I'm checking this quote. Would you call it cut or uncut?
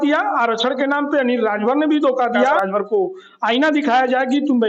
cut